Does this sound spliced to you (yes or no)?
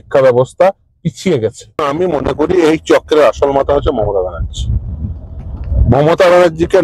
yes